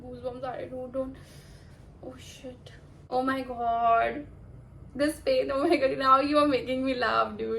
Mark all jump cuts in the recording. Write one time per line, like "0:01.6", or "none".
0:03.0